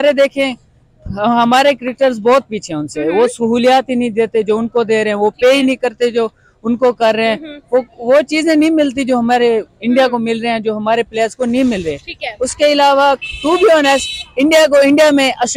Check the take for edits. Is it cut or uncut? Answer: uncut